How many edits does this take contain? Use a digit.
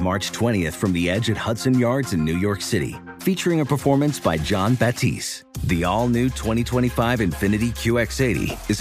0